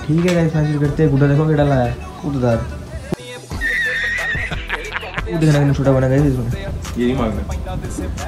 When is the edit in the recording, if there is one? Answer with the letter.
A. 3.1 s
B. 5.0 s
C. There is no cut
C